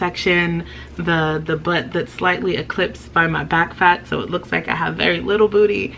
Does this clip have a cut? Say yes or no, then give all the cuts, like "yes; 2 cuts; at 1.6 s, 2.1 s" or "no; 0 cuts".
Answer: no; 0 cuts